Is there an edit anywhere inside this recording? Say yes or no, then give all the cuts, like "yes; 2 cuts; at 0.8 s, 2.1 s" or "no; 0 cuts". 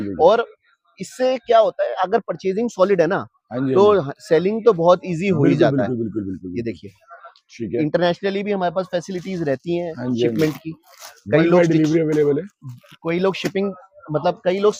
no; 0 cuts